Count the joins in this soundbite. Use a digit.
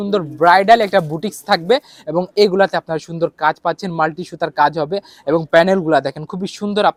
0